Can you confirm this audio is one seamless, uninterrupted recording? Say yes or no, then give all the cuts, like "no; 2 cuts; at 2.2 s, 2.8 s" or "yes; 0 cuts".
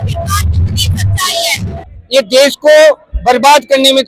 no; 1 cut; at 1.9 s